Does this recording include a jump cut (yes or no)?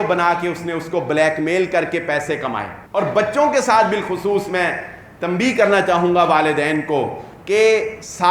yes